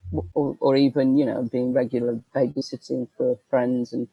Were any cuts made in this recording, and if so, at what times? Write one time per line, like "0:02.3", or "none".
none